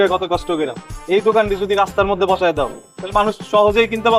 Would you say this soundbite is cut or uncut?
uncut